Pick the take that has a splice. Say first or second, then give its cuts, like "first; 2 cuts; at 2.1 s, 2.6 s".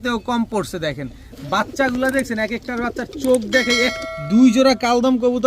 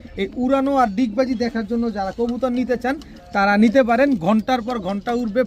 first; 1 cut; at 4.0 s